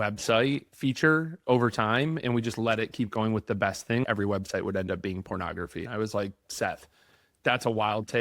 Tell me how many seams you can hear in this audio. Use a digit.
2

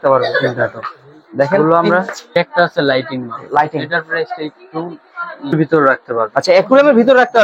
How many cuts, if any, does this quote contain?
2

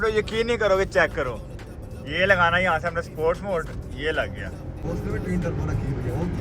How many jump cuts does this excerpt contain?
1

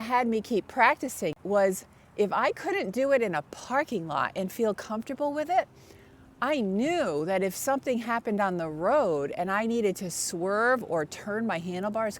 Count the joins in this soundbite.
1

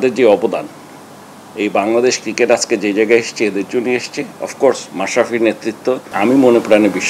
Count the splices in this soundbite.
1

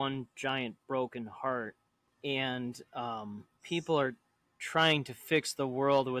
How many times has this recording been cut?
1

